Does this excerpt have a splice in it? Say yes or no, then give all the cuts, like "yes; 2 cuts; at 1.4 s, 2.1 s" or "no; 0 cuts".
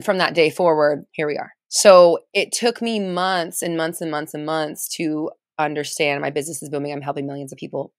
no; 0 cuts